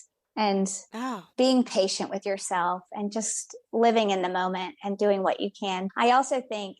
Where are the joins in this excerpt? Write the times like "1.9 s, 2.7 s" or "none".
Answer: none